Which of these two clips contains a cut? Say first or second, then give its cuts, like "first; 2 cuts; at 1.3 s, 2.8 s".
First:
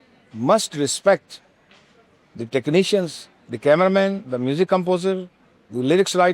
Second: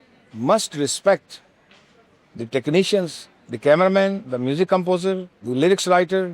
second; 1 cut; at 5.3 s